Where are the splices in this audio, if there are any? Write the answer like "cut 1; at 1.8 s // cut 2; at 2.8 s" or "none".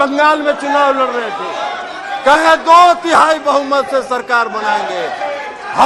none